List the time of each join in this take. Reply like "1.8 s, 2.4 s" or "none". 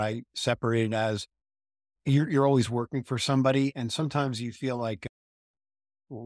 none